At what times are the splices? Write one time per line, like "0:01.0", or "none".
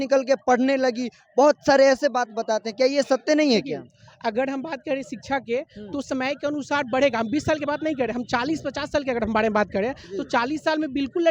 none